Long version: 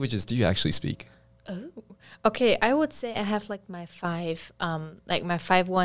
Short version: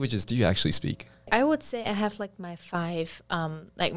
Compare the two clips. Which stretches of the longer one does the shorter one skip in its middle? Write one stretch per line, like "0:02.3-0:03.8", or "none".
0:01.3-0:02.6